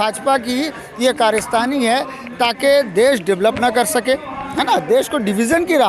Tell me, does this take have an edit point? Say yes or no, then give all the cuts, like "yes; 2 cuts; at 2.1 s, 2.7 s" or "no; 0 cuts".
no; 0 cuts